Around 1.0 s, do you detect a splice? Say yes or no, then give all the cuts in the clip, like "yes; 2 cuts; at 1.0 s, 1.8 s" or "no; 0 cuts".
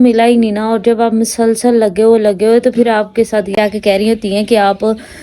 no; 1 cut; at 3.6 s